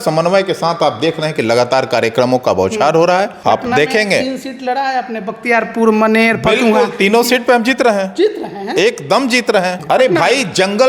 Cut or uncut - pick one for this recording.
cut